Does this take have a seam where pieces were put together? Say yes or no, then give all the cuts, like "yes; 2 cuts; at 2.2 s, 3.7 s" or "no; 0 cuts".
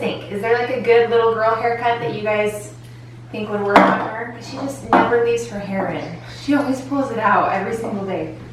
no; 0 cuts